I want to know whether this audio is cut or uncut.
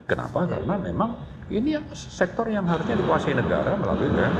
uncut